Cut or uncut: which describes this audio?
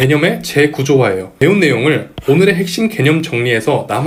uncut